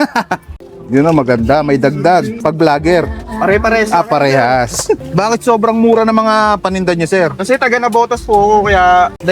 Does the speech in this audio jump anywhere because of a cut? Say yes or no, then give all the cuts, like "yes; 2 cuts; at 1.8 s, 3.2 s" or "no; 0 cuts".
yes; 2 cuts; at 2.3 s, 5.1 s